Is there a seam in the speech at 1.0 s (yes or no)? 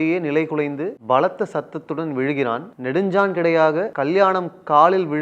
yes